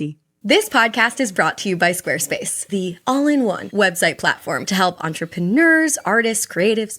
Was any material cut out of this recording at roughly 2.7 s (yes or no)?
yes